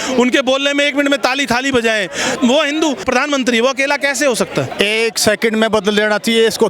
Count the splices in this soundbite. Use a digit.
3